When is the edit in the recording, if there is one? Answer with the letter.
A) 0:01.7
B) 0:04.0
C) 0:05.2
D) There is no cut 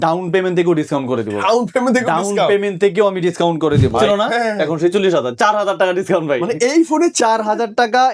B